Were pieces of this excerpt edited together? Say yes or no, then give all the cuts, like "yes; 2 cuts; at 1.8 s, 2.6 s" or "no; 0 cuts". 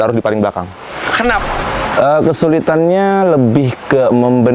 yes; 1 cut; at 1.4 s